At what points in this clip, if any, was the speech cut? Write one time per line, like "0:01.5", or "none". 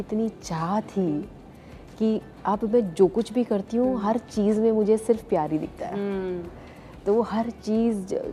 none